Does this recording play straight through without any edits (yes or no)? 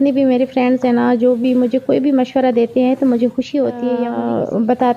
no